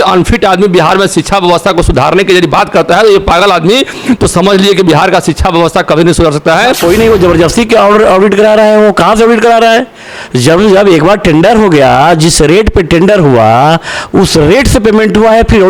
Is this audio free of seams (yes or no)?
no